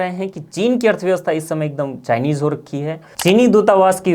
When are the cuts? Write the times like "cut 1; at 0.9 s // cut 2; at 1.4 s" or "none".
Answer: cut 1; at 3.0 s